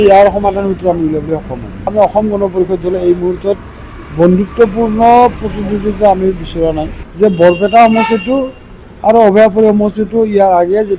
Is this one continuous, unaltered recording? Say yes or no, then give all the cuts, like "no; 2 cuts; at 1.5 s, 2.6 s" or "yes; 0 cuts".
no; 2 cuts; at 1.9 s, 7.0 s